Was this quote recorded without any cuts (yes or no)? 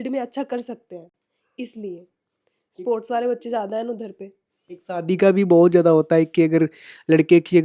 yes